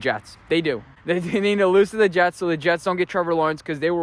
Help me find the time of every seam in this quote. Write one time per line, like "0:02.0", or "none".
0:00.9